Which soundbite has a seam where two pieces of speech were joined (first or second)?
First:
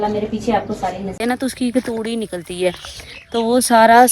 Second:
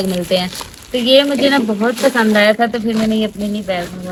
first